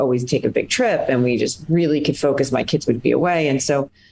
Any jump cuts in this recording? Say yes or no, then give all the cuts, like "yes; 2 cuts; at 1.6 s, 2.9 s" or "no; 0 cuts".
no; 0 cuts